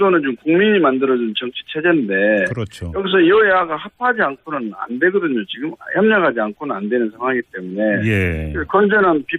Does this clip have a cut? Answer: yes; 1 cut; at 1.5 s

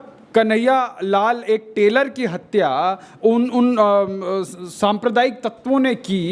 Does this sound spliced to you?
no; 0 cuts

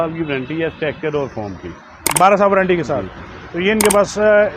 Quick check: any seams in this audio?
no; 0 cuts

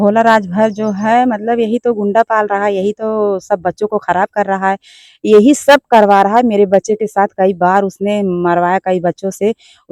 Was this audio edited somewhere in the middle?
no; 0 cuts

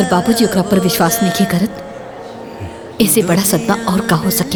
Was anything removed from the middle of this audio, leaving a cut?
no; 0 cuts

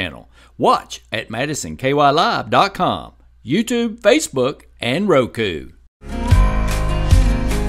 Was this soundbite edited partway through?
yes; 1 cut; at 6.1 s

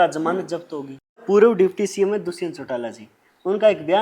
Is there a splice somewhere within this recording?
yes; 1 cut; at 1.2 s

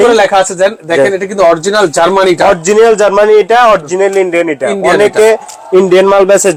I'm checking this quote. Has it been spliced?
no; 0 cuts

